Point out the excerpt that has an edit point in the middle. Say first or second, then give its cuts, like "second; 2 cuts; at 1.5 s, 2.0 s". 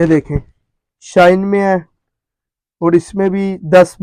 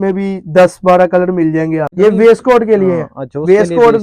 second; 1 cut; at 1.9 s